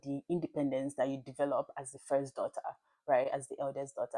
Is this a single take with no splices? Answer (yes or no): yes